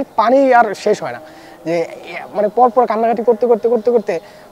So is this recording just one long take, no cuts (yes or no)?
yes